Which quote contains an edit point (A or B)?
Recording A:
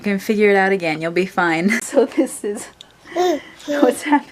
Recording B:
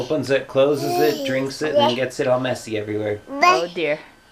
A